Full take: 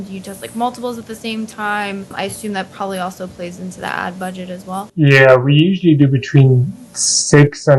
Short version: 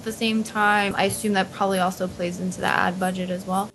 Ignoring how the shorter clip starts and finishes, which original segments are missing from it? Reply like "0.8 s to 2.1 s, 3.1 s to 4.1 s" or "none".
1.9 s to 2.1 s